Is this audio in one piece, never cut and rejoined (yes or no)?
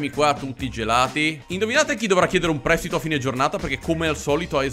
no